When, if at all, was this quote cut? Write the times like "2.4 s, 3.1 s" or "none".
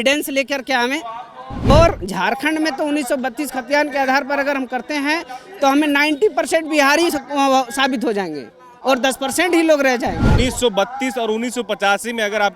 1.7 s, 10.4 s